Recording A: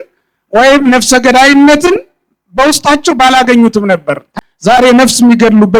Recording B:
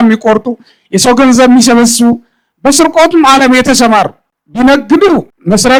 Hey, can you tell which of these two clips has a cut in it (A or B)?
A